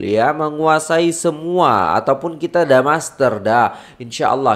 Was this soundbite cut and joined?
no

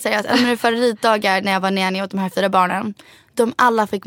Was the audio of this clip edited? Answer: no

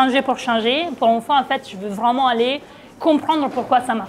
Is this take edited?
no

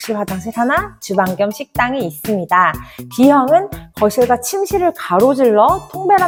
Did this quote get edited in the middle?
no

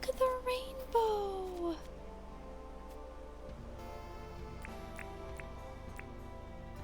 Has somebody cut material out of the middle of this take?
no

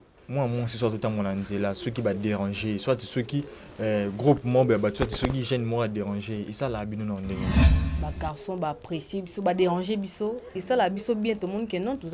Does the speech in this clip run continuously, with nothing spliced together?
no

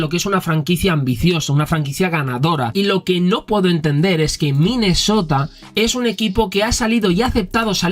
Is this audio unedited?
no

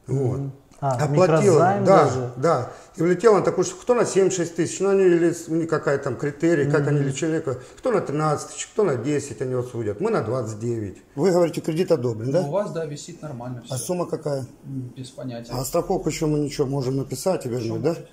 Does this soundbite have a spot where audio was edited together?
yes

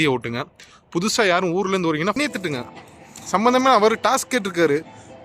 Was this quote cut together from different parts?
yes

